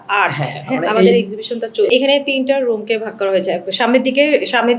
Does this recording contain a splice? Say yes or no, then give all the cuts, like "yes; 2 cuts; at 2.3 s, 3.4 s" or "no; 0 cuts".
yes; 1 cut; at 1.9 s